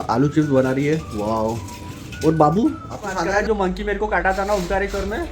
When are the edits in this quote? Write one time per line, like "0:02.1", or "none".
0:03.4